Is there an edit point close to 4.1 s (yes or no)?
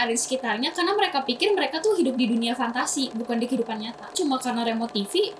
yes